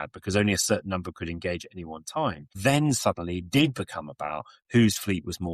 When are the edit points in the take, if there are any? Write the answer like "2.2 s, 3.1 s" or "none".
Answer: 2.5 s